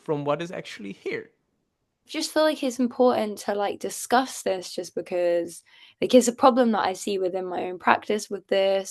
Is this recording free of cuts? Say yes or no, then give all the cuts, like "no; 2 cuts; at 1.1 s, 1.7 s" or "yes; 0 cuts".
no; 1 cut; at 2.1 s